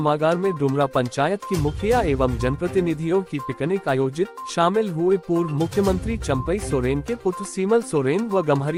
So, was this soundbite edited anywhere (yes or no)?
no